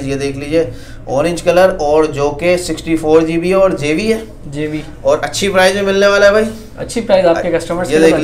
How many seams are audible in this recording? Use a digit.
0